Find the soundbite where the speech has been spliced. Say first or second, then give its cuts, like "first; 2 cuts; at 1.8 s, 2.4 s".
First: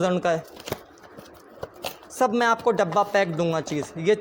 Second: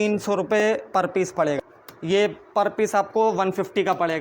second; 1 cut; at 1.6 s